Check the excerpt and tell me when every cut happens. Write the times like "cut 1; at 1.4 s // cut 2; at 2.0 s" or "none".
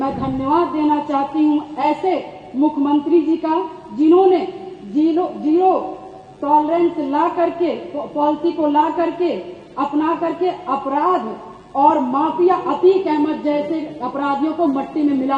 none